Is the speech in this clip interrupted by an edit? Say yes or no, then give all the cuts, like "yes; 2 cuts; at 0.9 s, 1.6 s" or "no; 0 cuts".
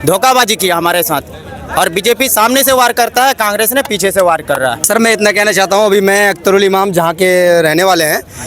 yes; 1 cut; at 4.8 s